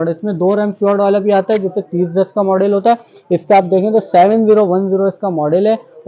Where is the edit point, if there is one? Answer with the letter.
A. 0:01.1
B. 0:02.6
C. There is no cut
C